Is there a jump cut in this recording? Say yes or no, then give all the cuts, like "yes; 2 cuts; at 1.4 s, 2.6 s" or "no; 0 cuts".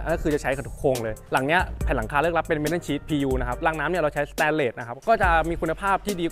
yes; 3 cuts; at 1.2 s, 3.6 s, 5.0 s